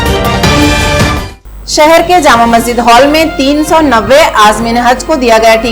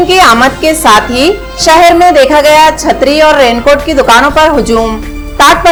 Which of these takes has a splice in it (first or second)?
first